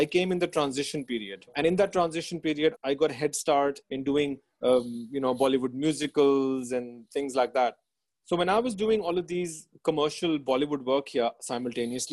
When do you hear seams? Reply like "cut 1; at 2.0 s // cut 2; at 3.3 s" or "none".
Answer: cut 1; at 1.5 s // cut 2; at 2.8 s // cut 3; at 3.8 s